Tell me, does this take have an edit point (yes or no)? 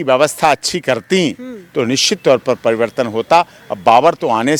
no